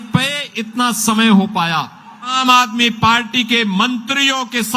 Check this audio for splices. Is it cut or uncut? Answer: cut